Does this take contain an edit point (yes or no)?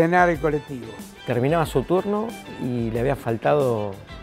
yes